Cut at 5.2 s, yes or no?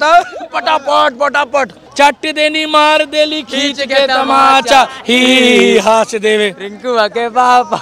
no